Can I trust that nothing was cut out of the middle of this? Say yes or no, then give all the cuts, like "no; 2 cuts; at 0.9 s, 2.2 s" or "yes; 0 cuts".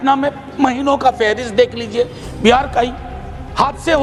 yes; 0 cuts